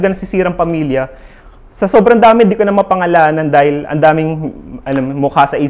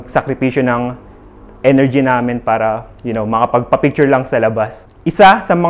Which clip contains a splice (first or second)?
second